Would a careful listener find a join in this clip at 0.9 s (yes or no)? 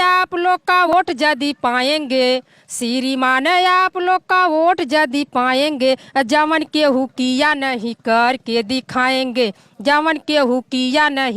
yes